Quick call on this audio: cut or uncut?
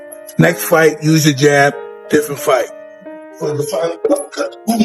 cut